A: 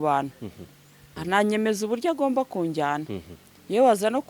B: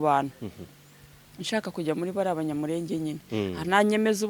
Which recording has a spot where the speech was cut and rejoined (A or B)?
A